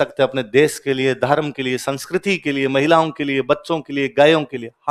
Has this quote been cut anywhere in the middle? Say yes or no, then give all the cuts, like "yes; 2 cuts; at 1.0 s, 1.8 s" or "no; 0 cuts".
no; 0 cuts